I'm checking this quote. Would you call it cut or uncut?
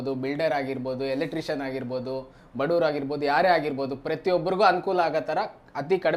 uncut